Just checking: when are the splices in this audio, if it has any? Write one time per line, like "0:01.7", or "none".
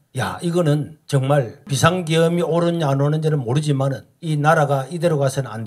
none

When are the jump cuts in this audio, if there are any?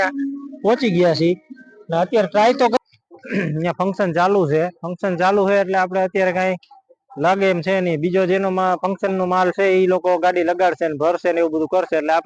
0:02.8

